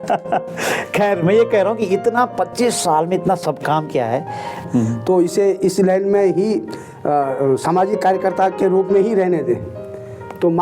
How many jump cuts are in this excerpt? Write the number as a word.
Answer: one